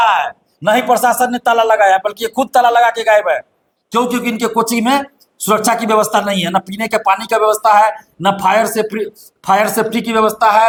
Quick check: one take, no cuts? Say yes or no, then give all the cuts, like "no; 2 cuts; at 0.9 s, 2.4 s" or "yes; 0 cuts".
yes; 0 cuts